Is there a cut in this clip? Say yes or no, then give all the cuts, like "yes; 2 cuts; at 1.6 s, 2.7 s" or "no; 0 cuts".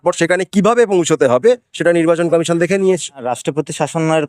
yes; 1 cut; at 3.4 s